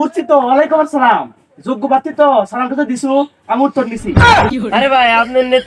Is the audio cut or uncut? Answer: cut